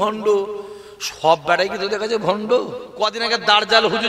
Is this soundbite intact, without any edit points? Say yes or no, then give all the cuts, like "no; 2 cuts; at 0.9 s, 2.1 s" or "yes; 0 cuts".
no; 1 cut; at 2.8 s